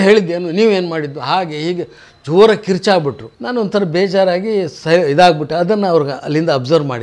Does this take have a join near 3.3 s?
yes; 1 cut; at 3.3 s

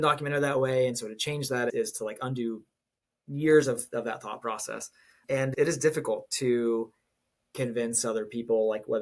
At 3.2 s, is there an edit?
no; 2 cuts; at 1.7 s, 5.4 s

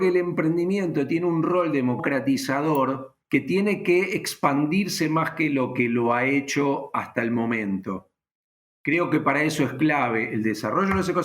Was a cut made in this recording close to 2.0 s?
yes; 2 cuts; at 2.0 s, 3.1 s

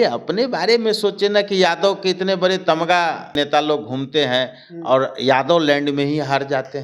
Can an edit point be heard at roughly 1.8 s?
no; 1 cut; at 3.4 s

